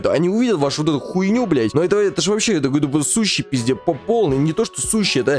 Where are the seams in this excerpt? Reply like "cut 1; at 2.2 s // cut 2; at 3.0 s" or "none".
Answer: cut 1; at 1.7 s